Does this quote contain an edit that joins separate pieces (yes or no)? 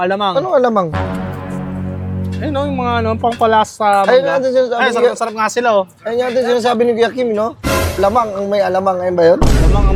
no